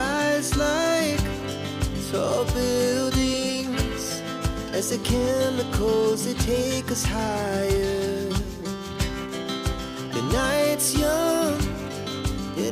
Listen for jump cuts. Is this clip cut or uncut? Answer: uncut